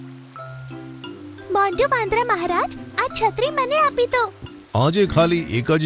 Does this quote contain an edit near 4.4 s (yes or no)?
yes